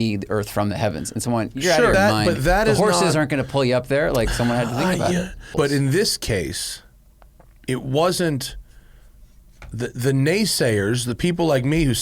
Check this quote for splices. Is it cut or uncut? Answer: cut